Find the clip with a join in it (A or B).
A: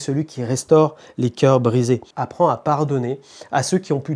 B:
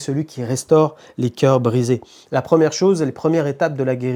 A